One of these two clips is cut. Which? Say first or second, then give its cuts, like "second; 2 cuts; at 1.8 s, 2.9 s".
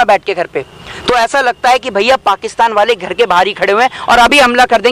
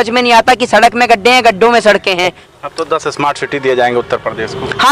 second; 1 cut; at 2.4 s